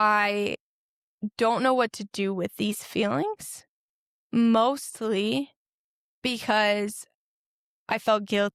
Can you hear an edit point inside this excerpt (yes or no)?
no